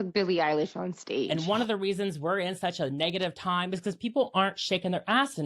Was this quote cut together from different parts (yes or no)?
yes